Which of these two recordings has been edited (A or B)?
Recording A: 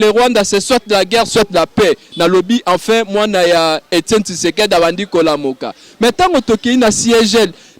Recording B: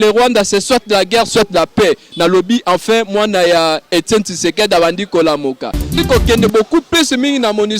B